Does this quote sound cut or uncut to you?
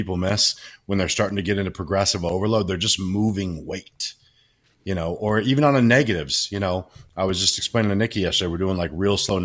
uncut